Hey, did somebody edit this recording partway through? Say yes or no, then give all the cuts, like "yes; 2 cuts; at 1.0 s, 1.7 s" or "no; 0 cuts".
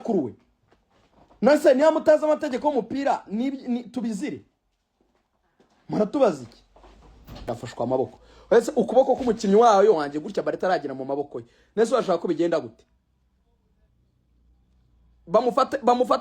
yes; 1 cut; at 7.4 s